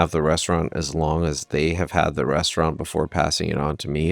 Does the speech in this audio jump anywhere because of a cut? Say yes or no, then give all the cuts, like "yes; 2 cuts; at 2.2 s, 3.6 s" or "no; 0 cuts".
no; 0 cuts